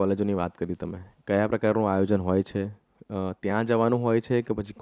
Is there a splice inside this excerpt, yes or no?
no